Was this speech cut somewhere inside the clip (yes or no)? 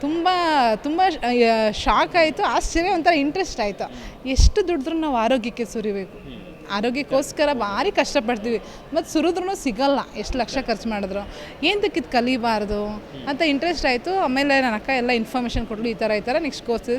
no